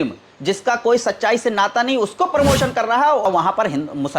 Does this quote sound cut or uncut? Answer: cut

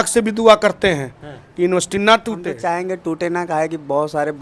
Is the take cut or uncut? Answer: cut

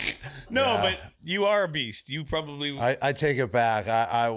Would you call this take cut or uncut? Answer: uncut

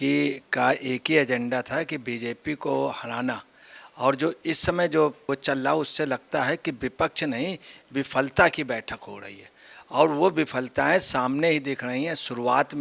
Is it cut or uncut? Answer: uncut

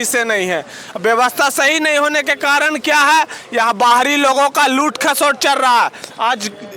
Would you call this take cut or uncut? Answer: uncut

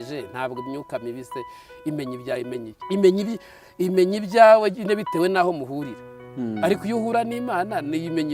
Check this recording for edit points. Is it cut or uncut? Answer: uncut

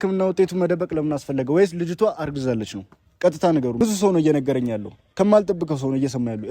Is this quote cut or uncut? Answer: cut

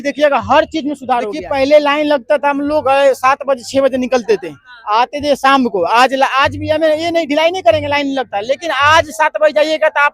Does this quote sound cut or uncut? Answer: cut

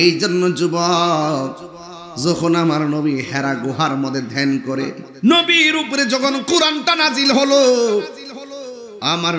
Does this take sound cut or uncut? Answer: cut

